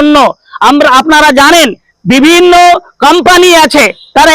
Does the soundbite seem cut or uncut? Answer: uncut